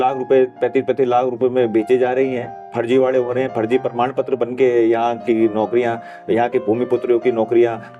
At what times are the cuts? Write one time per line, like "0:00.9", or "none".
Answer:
none